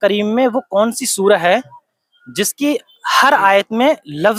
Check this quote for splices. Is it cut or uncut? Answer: uncut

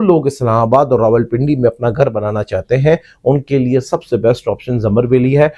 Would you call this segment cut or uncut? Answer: uncut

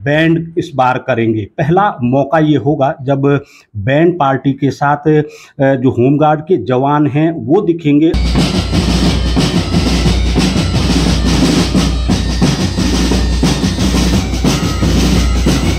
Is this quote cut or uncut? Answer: uncut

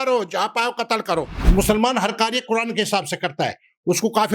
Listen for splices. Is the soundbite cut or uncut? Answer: cut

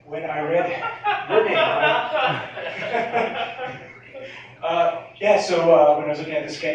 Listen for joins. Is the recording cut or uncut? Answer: uncut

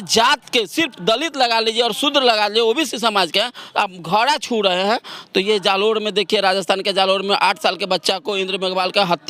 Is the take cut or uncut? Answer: uncut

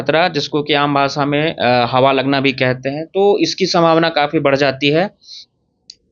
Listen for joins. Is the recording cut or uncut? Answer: uncut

